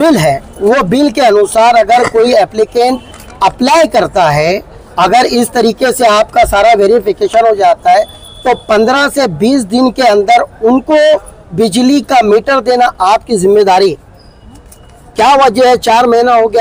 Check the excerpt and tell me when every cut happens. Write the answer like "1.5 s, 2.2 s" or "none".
none